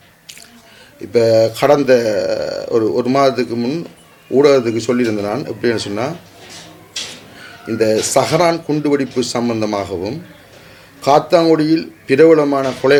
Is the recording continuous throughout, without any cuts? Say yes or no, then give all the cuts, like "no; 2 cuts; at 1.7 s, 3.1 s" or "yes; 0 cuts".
yes; 0 cuts